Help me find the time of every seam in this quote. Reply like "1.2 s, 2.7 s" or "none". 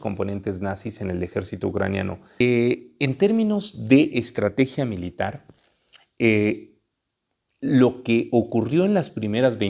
2.4 s

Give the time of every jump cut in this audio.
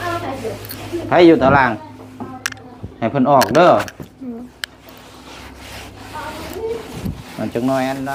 none

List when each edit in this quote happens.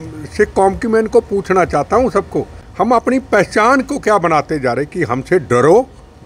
2.6 s

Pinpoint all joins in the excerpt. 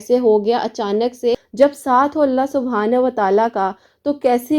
1.4 s

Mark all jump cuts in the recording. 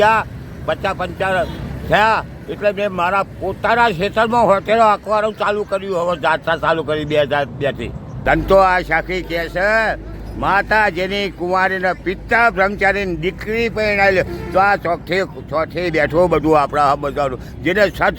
8.1 s

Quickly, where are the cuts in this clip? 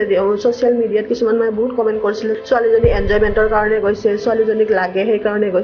2.3 s

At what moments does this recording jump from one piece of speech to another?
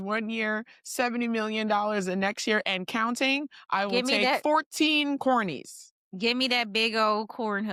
none

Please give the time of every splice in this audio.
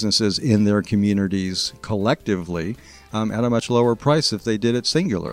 none

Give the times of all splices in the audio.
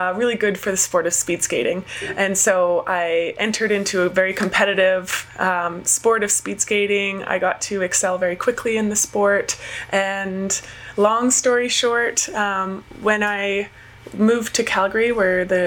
none

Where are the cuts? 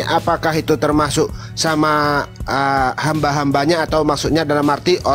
none

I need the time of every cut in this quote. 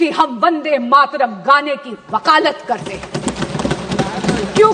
none

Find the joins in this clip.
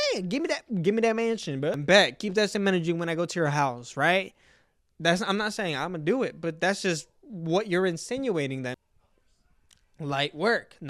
1.8 s, 8.8 s

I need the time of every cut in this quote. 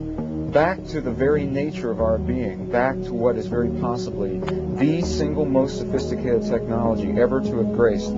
6.4 s

